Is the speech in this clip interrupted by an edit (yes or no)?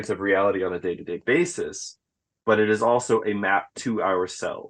no